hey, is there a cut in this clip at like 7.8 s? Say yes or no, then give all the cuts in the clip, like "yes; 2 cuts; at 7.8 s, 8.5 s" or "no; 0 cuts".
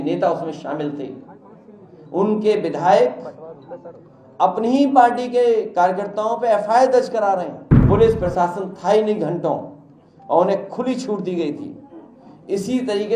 yes; 1 cut; at 7.8 s